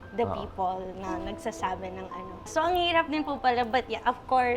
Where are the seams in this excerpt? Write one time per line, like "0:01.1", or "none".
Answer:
0:02.5